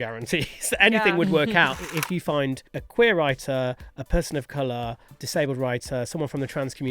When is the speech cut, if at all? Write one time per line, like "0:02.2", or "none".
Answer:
0:01.8
0:02.7
0:05.1